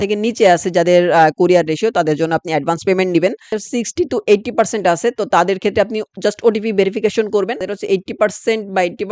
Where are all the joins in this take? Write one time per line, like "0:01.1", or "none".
0:03.6
0:07.7

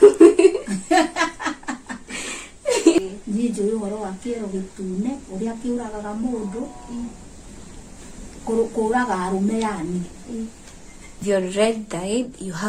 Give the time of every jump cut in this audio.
0:11.2

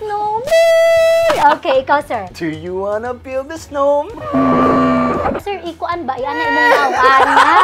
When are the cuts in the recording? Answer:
0:02.3

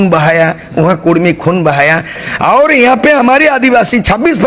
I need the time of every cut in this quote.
0:02.1

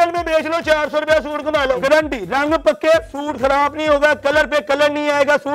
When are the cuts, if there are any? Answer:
0:01.8

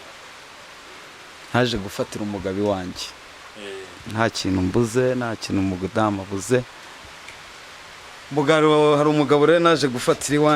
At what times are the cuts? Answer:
none

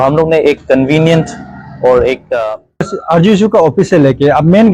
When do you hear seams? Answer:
0:03.0

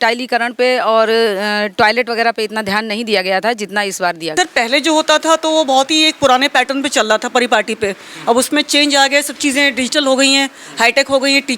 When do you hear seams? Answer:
0:04.2

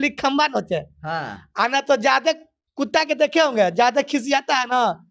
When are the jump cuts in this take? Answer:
none

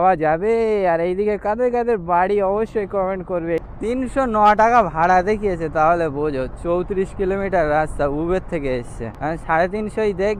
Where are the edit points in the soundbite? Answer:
0:03.7
0:09.0

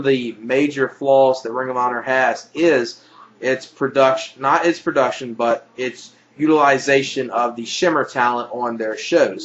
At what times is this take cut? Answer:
0:01.1

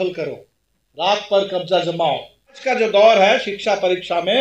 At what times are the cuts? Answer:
0:02.6

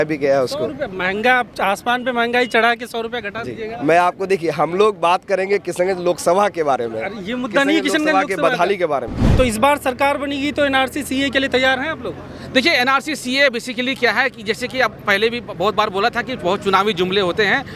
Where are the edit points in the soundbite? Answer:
0:09.2

